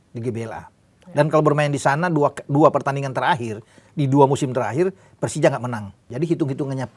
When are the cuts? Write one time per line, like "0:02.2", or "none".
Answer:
0:06.0